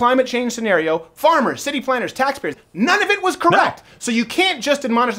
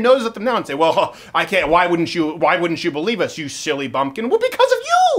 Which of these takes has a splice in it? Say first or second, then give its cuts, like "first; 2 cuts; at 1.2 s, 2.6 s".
first; 1 cut; at 2.6 s